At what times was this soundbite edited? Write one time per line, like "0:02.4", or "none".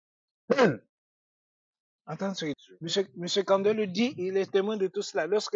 0:02.6